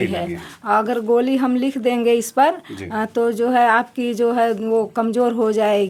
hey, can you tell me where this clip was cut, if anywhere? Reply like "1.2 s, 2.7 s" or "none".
none